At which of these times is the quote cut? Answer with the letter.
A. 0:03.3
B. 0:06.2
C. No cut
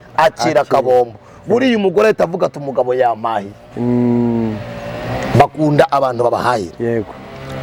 C